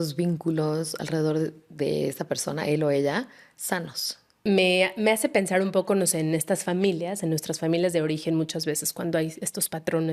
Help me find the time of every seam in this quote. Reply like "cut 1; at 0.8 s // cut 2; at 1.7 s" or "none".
cut 1; at 4.4 s